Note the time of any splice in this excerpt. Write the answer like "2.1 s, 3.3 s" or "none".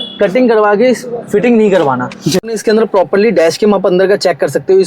2.4 s